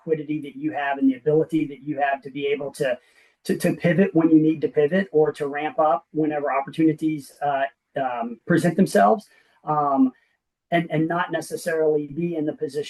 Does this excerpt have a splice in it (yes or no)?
no